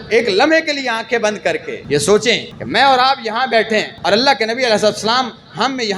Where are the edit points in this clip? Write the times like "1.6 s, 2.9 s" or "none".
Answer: 1.7 s, 2.5 s, 3.9 s